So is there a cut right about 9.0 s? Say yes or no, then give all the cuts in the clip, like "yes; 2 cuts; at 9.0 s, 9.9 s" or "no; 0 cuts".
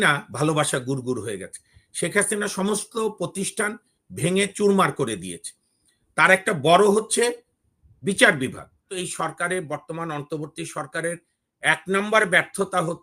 yes; 1 cut; at 9.0 s